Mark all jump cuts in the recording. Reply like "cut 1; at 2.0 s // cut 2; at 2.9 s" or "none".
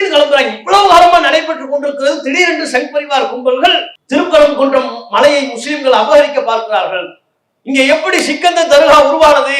cut 1; at 3.9 s